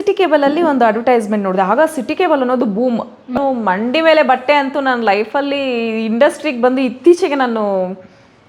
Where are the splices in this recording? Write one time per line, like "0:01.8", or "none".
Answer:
0:03.3